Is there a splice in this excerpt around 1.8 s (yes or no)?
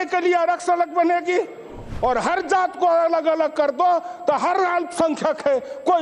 yes